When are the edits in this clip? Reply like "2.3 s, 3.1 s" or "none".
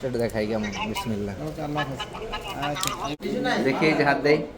3.1 s